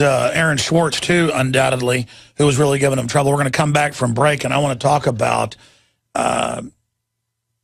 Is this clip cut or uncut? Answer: uncut